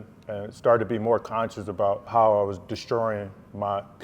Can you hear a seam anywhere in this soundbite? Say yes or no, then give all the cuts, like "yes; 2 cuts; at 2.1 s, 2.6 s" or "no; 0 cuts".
yes; 1 cut; at 2.1 s